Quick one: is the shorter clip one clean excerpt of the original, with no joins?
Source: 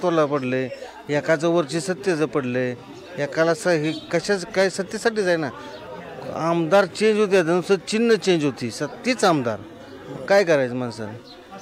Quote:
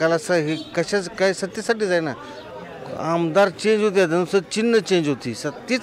yes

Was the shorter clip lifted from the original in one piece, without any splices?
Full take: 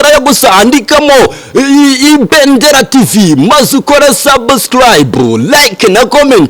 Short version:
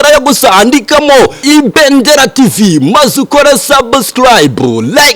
no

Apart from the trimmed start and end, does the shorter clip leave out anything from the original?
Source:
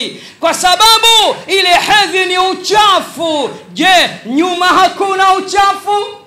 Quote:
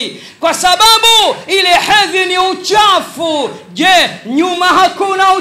no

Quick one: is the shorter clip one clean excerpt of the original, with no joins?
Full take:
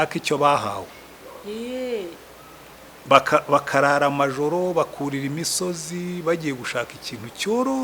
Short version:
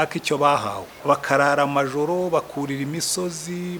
no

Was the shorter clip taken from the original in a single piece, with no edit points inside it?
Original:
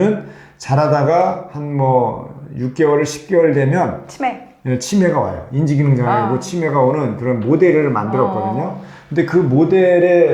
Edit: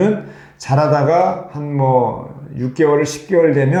yes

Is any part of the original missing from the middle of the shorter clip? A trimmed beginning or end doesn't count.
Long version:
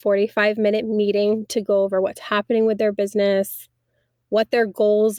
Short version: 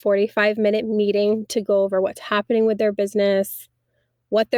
no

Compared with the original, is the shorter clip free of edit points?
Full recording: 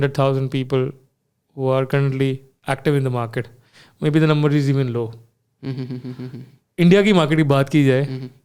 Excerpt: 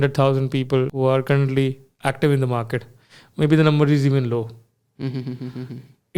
no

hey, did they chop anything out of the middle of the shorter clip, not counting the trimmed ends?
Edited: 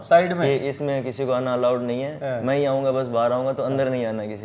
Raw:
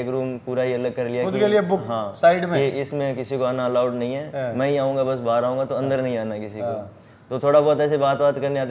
no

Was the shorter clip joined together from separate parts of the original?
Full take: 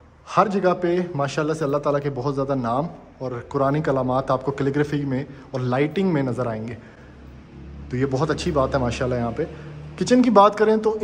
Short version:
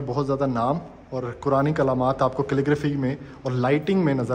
no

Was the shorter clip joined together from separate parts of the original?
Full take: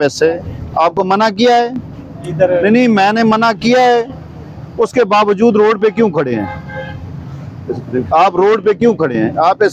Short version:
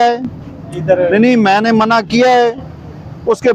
no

